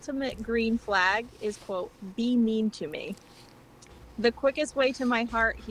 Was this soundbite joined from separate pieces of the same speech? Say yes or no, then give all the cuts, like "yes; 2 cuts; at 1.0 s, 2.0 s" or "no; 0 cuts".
no; 0 cuts